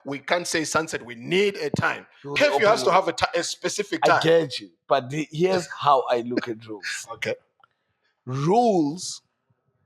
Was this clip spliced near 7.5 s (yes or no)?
no